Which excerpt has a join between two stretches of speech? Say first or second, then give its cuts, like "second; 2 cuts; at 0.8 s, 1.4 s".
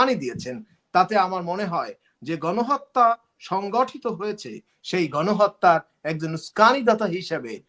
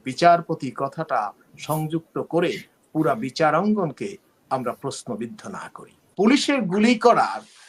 second; 1 cut; at 6.1 s